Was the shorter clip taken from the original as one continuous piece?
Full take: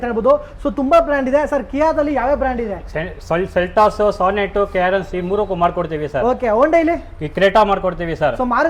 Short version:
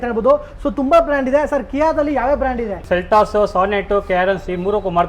no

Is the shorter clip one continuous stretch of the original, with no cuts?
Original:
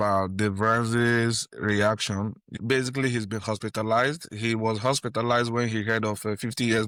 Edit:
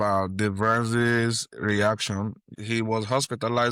no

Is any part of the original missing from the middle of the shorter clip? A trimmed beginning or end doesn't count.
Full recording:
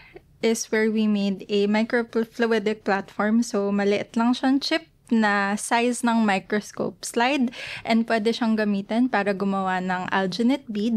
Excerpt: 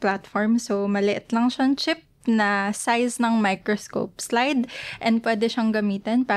no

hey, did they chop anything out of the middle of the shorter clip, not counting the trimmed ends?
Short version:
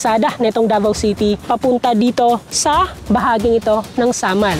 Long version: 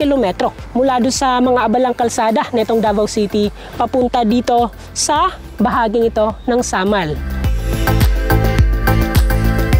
yes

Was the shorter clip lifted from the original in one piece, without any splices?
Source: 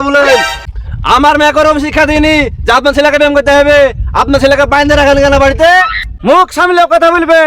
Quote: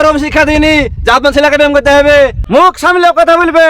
no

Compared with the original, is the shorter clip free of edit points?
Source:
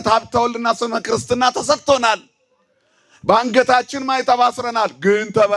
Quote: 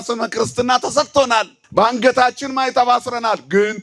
no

